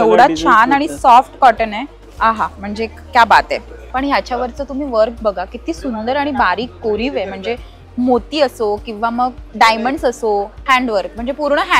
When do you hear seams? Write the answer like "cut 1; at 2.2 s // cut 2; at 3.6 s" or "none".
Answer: cut 1; at 2.0 s // cut 2; at 3.8 s // cut 3; at 10.5 s

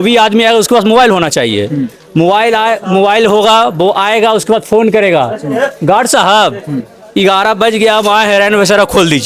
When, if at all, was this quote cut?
none

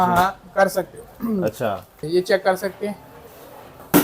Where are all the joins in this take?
cut 1; at 2.0 s

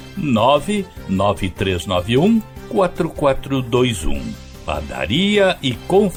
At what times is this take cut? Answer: none

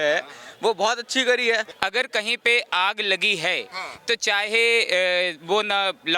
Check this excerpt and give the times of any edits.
cut 1; at 1.7 s

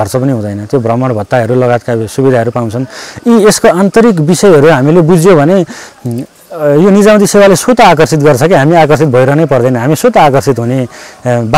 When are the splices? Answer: none

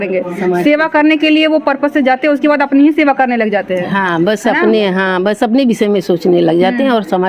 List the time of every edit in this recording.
none

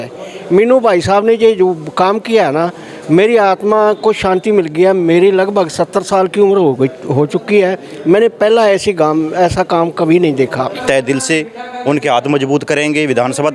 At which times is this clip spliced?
cut 1; at 10.8 s

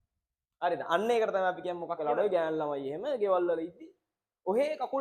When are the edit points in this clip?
cut 1; at 2.0 s

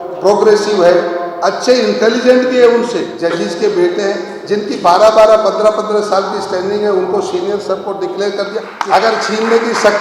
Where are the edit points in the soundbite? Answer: cut 1; at 3.1 s // cut 2; at 8.7 s

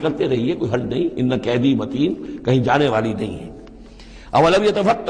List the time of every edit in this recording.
none

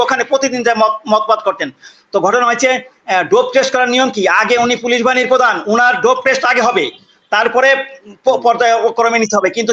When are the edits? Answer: none

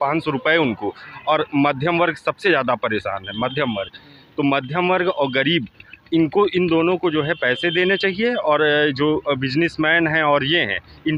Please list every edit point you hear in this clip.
none

